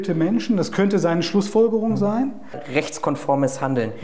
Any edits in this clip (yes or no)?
yes